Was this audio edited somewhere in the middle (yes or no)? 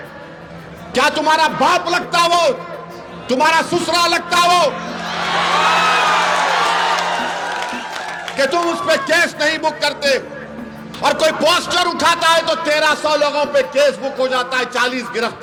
no